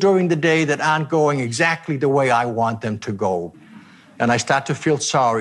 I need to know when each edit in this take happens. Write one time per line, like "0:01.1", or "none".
0:03.5